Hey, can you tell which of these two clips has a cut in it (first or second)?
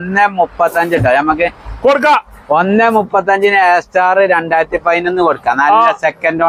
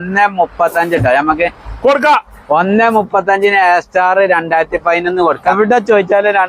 second